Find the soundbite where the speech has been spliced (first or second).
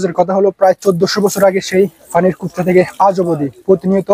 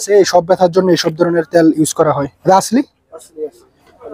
second